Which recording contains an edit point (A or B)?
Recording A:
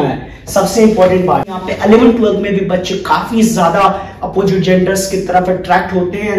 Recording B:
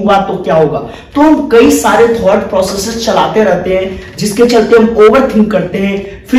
A